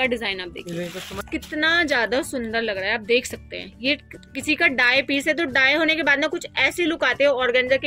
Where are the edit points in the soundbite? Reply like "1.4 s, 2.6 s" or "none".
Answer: 1.2 s